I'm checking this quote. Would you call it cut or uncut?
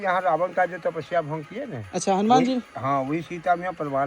uncut